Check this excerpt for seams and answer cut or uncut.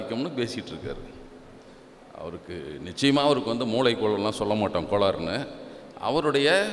uncut